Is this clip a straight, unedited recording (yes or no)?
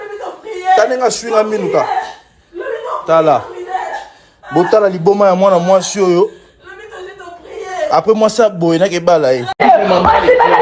no